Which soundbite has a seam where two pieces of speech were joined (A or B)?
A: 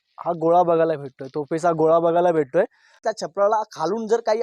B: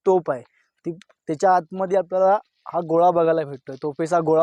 A